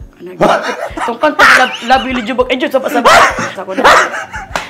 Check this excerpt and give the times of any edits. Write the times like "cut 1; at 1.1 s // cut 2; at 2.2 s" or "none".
cut 1; at 3.5 s